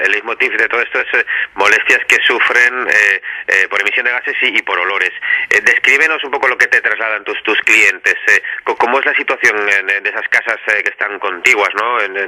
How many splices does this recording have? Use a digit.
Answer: 1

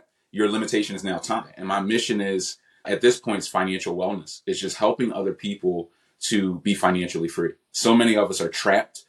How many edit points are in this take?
1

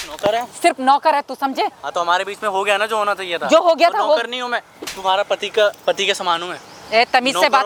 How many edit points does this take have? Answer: 0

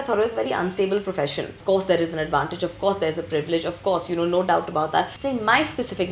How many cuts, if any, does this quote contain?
2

